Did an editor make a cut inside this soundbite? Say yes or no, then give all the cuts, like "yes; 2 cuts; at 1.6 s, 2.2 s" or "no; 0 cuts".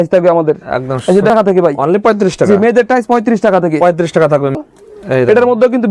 yes; 2 cuts; at 1.3 s, 4.6 s